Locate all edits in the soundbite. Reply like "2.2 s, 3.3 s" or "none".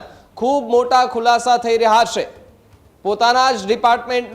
none